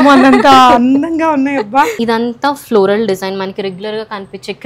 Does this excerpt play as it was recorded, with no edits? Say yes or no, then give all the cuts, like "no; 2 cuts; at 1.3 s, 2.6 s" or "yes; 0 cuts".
no; 1 cut; at 2.0 s